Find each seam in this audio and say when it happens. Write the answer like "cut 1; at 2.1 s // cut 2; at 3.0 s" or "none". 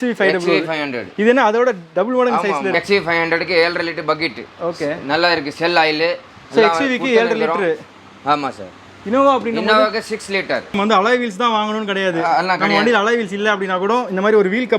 cut 1; at 2.7 s // cut 2; at 10.8 s